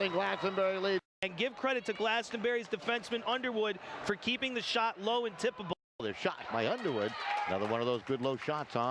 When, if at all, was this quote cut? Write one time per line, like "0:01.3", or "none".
0:01.1
0:06.0